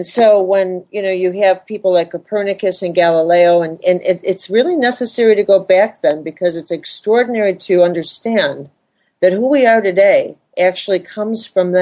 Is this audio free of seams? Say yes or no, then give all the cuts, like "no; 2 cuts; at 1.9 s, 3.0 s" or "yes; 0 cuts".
yes; 0 cuts